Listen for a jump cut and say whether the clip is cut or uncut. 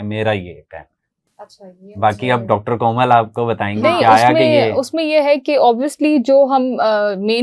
uncut